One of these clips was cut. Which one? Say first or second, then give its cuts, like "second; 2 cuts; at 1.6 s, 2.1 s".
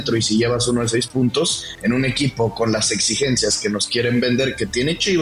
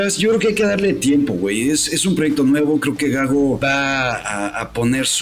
second; 1 cut; at 3.6 s